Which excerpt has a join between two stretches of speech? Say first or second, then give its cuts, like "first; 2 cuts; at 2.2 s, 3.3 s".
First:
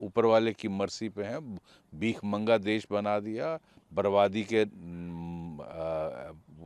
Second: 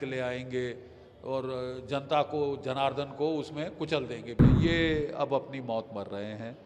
second; 1 cut; at 4.4 s